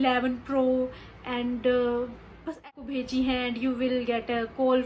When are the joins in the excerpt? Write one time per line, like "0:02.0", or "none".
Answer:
0:02.7